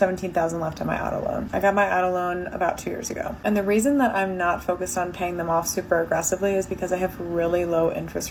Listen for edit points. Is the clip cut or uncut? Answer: uncut